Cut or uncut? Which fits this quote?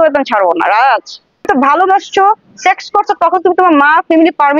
cut